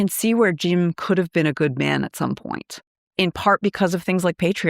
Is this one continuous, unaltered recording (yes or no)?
no